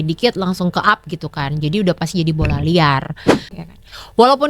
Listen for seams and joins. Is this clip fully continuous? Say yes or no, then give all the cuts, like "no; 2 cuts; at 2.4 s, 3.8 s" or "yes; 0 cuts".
no; 1 cut; at 3.5 s